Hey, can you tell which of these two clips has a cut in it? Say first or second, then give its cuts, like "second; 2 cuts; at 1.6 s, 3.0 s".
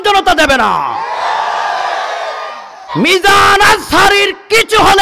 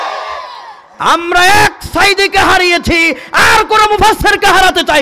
first; 1 cut; at 2.8 s